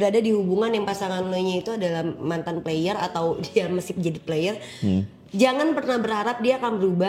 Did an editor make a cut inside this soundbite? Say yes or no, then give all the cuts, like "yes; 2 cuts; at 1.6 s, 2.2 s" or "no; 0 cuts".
no; 0 cuts